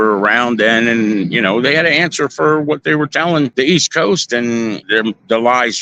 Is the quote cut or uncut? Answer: cut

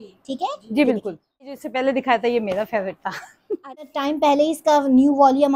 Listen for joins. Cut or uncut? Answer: cut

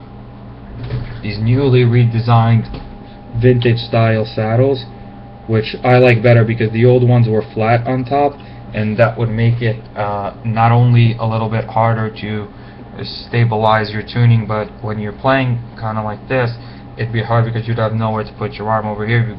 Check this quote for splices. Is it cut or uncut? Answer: cut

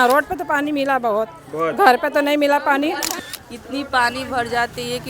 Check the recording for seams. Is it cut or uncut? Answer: cut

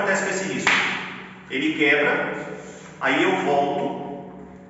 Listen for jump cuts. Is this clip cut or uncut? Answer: uncut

